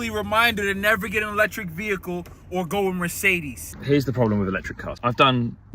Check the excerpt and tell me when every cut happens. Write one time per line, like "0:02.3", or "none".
0:03.7